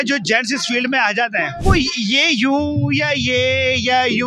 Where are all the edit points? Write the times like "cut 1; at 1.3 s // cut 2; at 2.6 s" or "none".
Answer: cut 1; at 1.5 s